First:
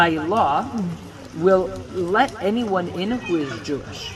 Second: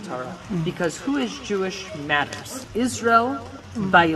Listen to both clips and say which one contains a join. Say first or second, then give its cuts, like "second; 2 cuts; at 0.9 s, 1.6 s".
second; 1 cut; at 2.6 s